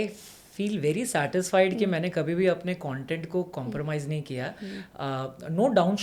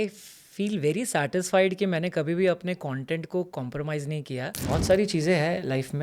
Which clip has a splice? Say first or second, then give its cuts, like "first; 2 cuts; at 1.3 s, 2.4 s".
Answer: second; 1 cut; at 4.5 s